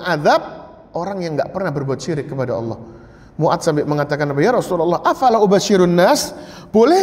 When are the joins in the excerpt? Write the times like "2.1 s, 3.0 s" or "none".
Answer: none